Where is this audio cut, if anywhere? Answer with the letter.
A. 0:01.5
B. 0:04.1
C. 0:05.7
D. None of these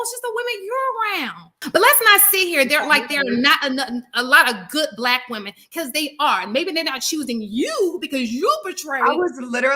A